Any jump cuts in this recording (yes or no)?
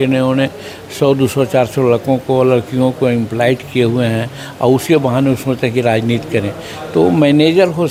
no